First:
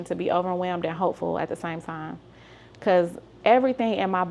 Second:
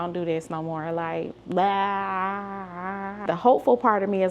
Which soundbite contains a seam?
second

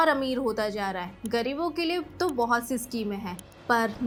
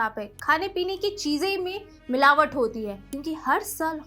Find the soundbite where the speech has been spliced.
second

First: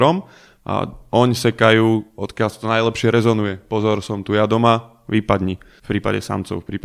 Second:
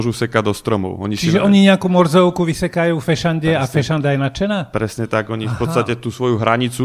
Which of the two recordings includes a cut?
first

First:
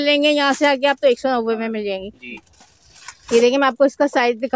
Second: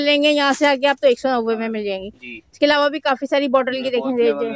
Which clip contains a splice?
first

